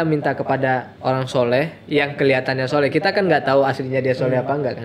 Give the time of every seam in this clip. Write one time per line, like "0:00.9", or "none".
0:00.9